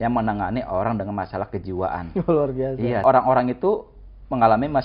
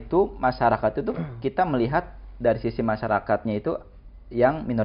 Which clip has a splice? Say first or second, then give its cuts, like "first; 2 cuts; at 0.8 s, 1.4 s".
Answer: first; 1 cut; at 3.0 s